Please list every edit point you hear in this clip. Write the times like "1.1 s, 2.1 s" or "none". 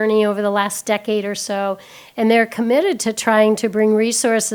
none